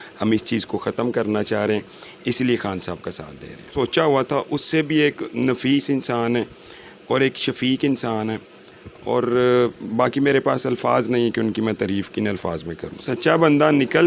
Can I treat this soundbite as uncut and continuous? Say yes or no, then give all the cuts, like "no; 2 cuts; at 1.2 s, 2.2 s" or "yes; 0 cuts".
no; 2 cuts; at 3.7 s, 13.1 s